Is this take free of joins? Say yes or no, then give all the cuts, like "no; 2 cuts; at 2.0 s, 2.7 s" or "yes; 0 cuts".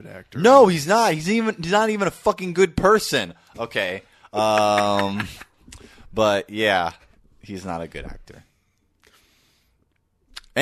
yes; 0 cuts